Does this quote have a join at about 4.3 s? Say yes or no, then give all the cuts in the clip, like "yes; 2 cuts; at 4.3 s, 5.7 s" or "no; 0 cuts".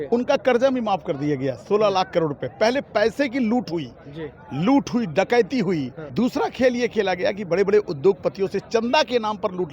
no; 1 cut; at 6.0 s